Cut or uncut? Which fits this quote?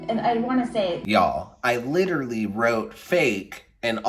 cut